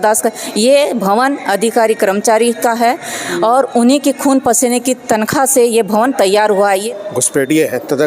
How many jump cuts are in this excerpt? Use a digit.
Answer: 1